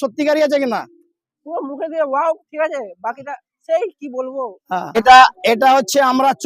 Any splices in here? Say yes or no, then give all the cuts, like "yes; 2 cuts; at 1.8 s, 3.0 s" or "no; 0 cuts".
yes; 1 cut; at 4.9 s